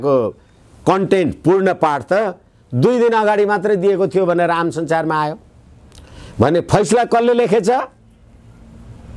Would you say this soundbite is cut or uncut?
uncut